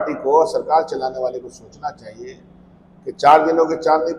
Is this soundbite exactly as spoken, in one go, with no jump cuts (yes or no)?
yes